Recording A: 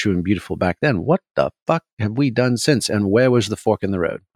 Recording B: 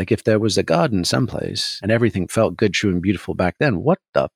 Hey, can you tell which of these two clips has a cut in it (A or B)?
B